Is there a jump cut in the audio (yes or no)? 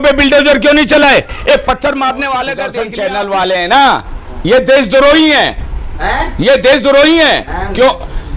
yes